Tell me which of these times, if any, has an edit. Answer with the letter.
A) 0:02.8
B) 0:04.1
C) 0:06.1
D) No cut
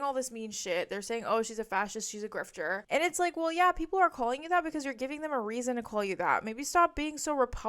A